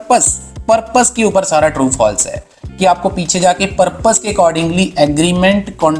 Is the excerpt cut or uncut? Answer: uncut